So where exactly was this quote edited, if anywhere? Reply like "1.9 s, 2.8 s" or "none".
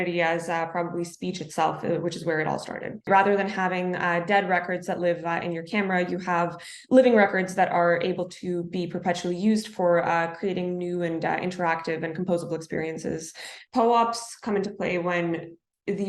3.1 s, 13.5 s